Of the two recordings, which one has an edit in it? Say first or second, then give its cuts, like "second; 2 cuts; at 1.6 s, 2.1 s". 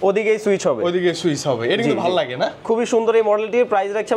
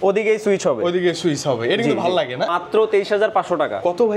second; 1 cut; at 2.6 s